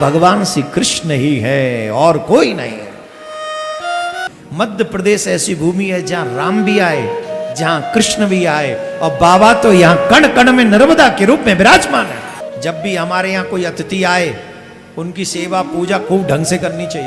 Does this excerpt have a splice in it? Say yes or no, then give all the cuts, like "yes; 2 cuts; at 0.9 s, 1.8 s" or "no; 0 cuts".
yes; 2 cuts; at 4.2 s, 12.4 s